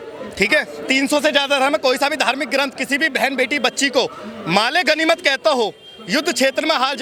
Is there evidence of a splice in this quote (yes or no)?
no